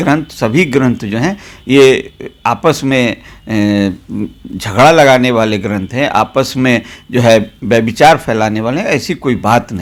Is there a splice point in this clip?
no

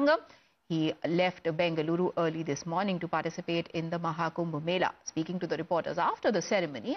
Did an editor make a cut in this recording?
yes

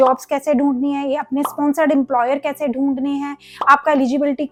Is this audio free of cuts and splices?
yes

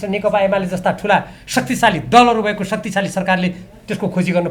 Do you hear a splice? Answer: no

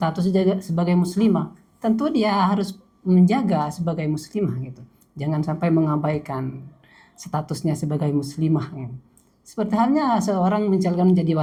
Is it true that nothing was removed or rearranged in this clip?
yes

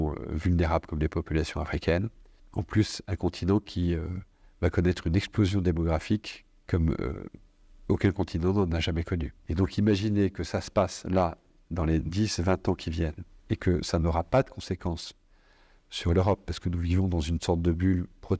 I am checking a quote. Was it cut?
yes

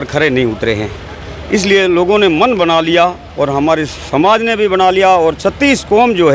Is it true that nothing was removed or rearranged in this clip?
yes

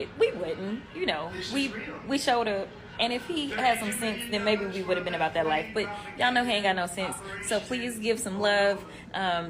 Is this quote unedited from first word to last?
no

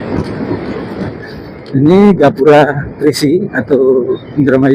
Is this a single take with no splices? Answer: no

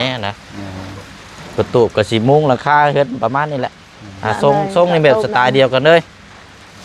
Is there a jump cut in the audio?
no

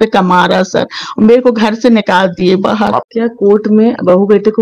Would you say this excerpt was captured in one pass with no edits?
no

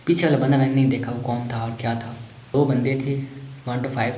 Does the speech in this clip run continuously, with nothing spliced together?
no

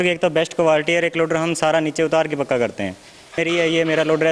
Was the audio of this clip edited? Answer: yes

